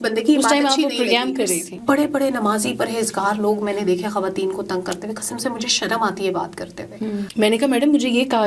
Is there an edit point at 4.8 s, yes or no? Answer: no